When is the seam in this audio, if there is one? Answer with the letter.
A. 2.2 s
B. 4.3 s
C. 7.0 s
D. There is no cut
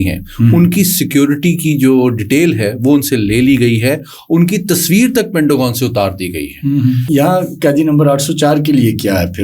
C